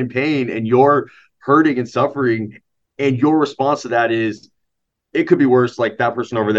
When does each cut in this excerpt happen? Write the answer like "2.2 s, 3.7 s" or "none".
none